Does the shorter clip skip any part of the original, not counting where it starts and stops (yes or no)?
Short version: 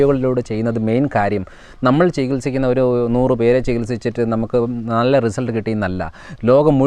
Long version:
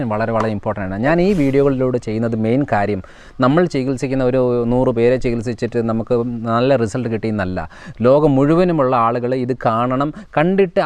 no